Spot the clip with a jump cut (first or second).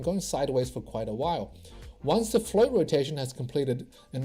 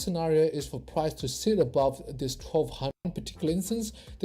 second